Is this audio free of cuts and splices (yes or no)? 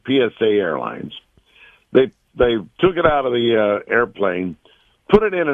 yes